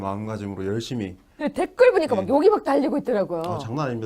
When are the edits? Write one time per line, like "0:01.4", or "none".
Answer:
0:03.0